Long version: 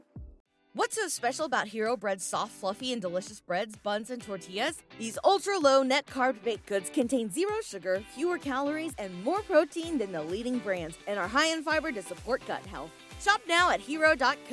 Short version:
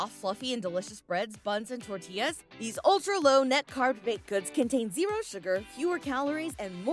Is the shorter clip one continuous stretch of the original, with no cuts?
yes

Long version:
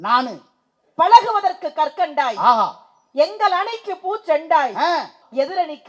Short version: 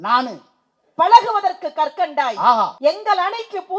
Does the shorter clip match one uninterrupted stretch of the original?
no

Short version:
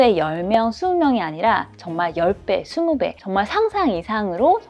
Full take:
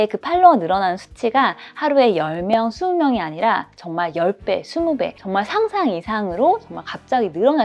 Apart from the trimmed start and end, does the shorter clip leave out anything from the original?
no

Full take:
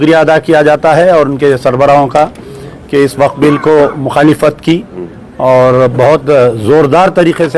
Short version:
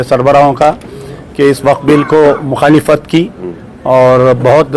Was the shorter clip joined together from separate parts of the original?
no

